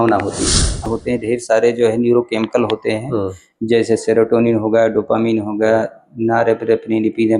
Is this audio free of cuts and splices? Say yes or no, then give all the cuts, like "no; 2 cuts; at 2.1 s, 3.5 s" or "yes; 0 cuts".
no; 1 cut; at 0.9 s